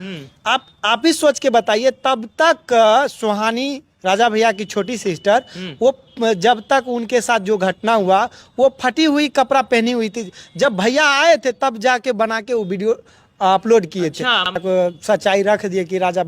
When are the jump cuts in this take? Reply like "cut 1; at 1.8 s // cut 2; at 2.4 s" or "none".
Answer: cut 1; at 14.6 s